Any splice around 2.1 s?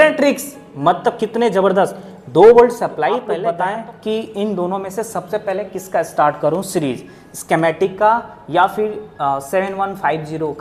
no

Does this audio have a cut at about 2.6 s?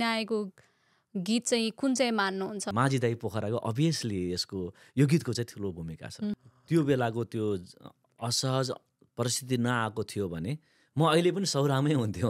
yes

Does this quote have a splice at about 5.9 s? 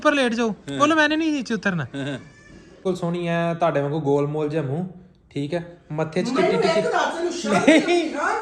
no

